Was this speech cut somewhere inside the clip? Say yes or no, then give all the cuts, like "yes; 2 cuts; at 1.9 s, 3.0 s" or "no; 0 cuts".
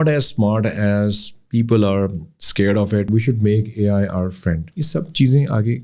yes; 2 cuts; at 3.1 s, 4.7 s